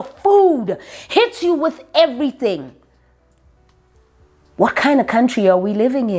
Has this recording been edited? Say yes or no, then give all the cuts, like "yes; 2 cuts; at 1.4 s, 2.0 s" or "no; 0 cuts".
no; 0 cuts